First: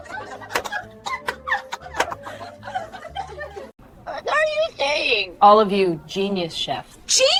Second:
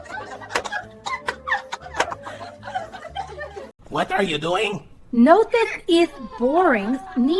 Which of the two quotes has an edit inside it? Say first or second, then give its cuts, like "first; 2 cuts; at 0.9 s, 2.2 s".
second; 1 cut; at 3.8 s